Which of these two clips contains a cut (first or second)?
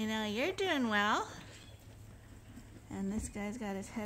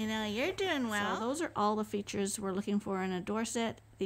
second